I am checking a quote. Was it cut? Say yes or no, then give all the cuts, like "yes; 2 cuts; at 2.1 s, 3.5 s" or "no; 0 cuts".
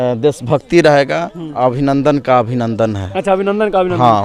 no; 0 cuts